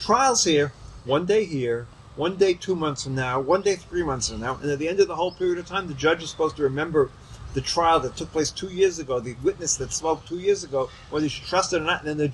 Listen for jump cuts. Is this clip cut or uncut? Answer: uncut